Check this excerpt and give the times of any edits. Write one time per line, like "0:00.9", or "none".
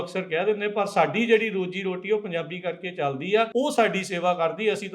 0:03.5